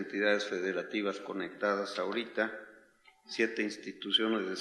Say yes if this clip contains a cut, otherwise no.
no